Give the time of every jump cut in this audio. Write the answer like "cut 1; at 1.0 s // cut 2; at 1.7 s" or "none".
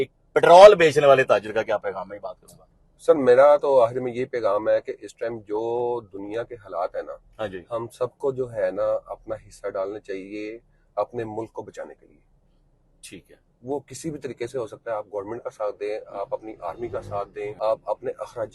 cut 1; at 17.5 s